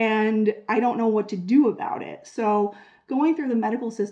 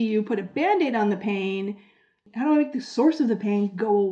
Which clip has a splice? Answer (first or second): second